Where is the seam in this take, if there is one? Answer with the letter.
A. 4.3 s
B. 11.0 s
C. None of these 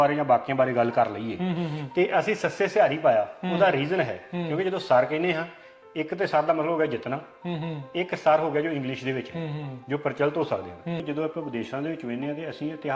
B